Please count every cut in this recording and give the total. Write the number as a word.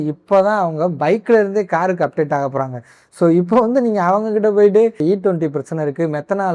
zero